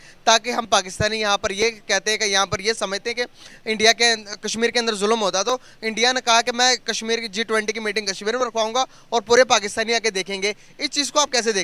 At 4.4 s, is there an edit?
no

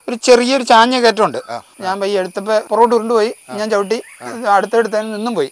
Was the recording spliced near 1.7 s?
yes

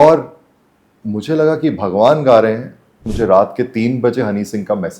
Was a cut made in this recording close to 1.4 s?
no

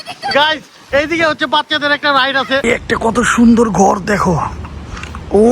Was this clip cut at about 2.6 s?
yes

